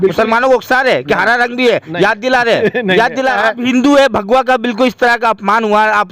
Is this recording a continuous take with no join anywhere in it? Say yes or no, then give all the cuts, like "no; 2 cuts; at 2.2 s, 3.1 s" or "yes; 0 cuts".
no; 1 cut; at 3.4 s